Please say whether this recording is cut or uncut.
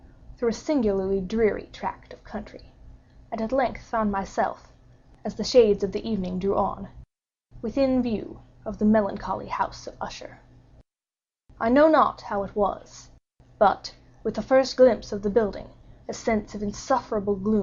uncut